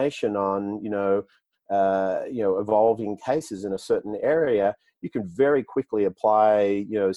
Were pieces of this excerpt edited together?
no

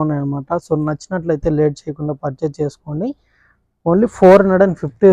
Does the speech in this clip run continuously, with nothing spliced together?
yes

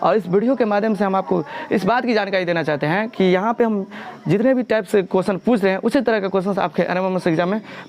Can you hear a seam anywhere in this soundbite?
no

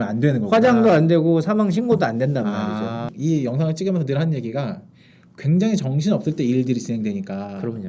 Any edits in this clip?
yes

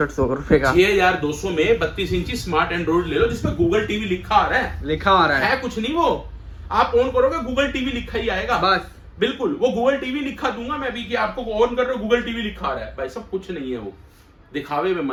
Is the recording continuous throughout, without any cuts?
yes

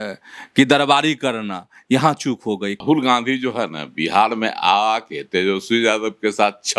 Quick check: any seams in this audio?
yes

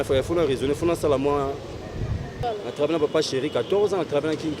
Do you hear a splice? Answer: yes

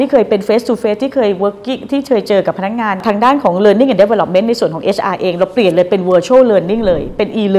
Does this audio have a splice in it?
no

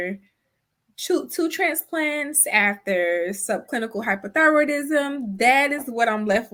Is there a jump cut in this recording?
no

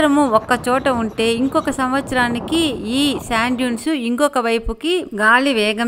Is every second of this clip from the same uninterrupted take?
yes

